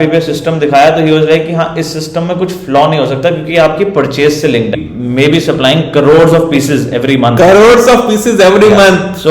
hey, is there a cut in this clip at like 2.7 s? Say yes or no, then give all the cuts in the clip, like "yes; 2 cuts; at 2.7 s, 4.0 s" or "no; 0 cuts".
no; 1 cut; at 4.8 s